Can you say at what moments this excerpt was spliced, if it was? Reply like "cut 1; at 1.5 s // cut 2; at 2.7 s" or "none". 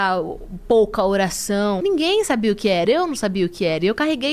cut 1; at 1.8 s